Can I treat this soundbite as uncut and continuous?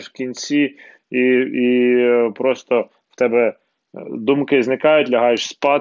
yes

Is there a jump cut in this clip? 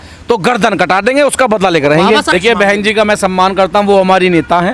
yes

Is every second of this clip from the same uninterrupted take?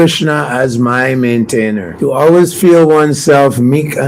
no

